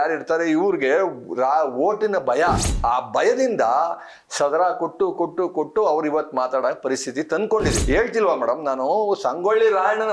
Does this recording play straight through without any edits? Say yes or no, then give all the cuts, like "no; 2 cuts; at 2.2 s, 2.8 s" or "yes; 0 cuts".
no; 2 cuts; at 2.7 s, 7.8 s